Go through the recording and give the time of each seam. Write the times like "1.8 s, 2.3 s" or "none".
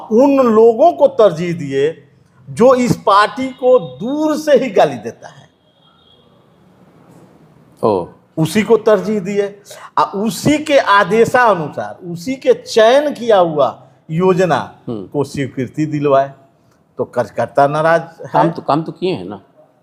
none